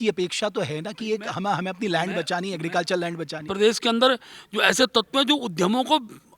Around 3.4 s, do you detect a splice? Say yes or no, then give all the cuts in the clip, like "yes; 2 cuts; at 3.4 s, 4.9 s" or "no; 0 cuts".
yes; 1 cut; at 3.4 s